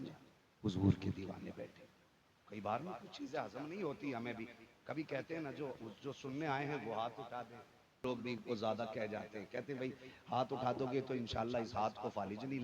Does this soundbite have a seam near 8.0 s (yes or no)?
yes